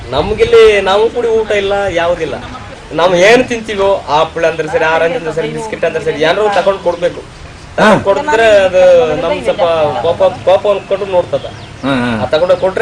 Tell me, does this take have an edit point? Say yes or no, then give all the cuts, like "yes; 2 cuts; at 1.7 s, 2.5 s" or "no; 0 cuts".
yes; 1 cut; at 2.8 s